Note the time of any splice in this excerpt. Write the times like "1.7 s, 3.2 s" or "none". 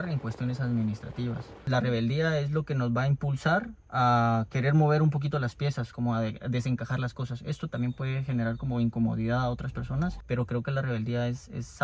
1.6 s, 10.2 s